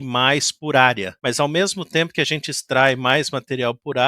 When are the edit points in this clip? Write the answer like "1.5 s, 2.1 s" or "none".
1.1 s